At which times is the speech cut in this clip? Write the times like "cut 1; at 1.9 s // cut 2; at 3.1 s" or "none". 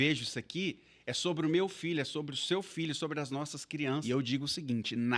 cut 1; at 4.0 s